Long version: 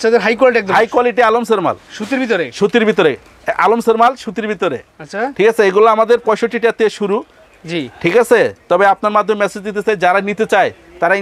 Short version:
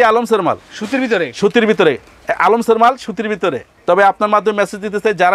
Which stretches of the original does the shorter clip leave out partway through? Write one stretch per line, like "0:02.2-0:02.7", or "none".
0:04.9-0:08.6